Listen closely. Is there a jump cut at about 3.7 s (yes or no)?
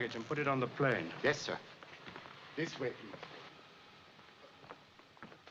no